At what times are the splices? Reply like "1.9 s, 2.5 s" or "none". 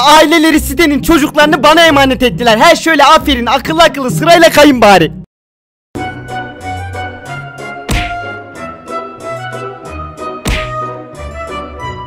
none